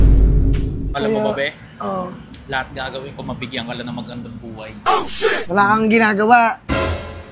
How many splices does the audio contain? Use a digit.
1